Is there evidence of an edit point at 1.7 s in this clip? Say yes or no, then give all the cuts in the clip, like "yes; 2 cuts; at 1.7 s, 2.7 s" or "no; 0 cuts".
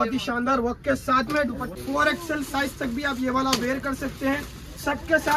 yes; 1 cut; at 1.7 s